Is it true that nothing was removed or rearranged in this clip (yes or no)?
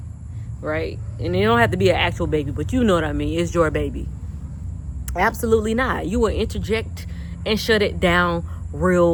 yes